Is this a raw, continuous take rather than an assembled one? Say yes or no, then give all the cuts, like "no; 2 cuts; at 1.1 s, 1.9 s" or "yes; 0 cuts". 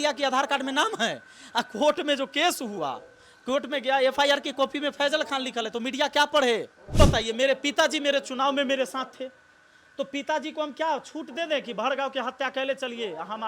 no; 1 cut; at 6.9 s